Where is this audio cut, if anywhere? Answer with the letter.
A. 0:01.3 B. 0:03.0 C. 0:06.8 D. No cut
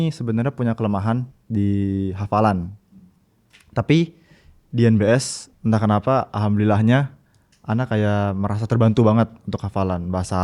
A